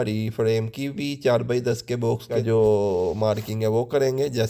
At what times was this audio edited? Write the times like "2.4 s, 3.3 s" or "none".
2.3 s

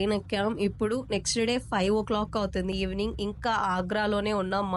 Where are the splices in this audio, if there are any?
none

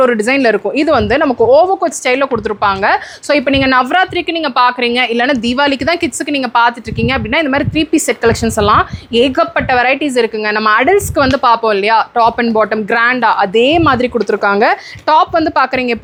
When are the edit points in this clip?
none

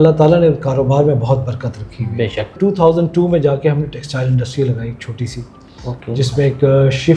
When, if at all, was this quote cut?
2.5 s

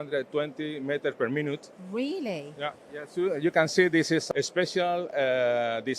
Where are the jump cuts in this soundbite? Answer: 4.2 s

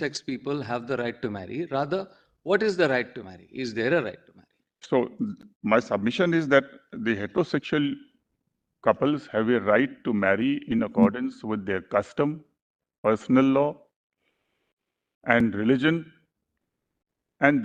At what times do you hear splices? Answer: none

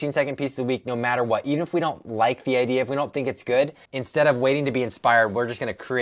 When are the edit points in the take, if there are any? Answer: 3.9 s

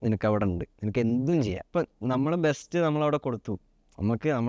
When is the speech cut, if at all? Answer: 1.6 s

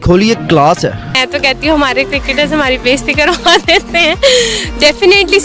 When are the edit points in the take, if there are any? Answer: 1.1 s

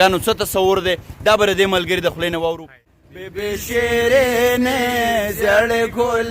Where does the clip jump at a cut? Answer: 2.9 s

